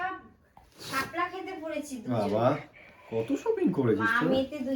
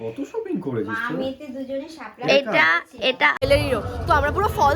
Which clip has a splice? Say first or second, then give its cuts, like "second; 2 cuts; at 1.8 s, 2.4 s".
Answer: second; 1 cut; at 3.4 s